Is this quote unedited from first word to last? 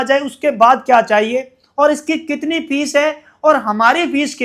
yes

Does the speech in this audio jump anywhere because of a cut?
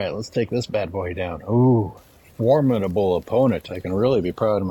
no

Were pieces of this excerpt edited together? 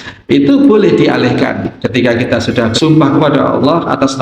yes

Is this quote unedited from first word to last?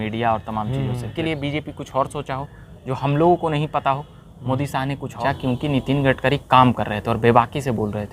no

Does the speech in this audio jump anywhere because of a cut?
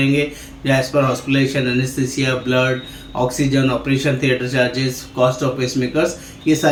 no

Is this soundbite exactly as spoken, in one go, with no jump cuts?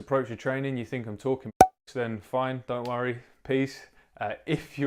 yes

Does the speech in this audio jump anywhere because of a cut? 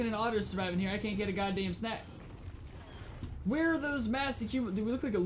no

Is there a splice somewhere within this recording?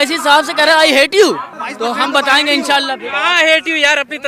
no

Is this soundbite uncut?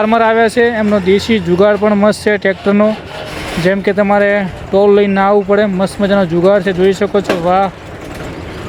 yes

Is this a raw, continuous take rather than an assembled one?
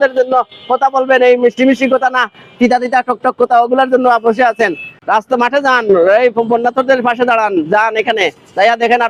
yes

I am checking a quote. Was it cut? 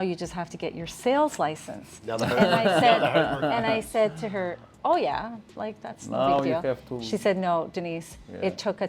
no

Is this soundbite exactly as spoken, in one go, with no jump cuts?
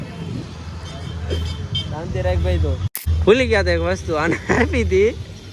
no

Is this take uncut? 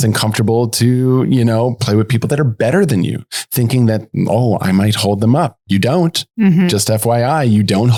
yes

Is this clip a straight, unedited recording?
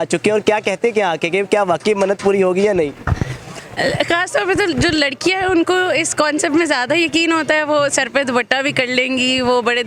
yes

